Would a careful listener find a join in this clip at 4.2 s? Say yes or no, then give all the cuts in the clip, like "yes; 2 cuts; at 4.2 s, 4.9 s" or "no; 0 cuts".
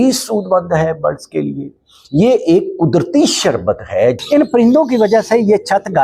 yes; 1 cut; at 4.2 s